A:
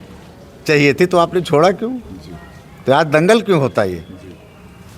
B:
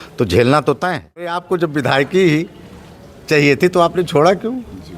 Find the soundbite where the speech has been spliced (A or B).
B